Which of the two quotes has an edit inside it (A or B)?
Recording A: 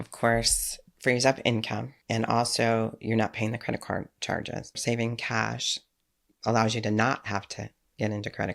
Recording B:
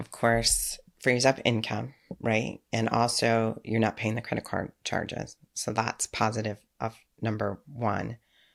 A